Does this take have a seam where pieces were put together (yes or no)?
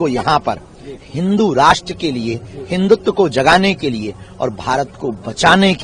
no